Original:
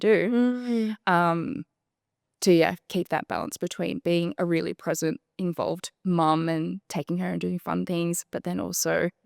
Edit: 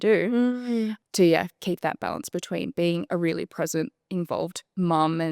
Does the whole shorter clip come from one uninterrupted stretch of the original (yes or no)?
no